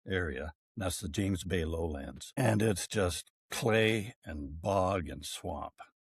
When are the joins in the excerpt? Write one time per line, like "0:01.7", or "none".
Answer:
0:02.4